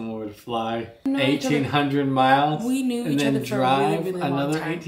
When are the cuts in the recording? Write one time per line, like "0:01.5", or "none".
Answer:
0:01.0